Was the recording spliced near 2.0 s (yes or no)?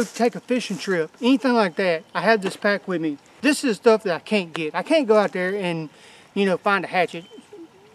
no